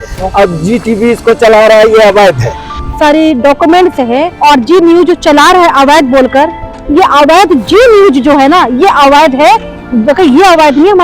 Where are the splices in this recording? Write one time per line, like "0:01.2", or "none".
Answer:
0:02.8
0:04.3